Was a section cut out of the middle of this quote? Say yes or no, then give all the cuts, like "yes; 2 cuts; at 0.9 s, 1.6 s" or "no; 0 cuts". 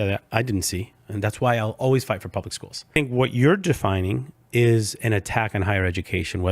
yes; 1 cut; at 2.9 s